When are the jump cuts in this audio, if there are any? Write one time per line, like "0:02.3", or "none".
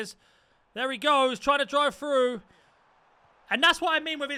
none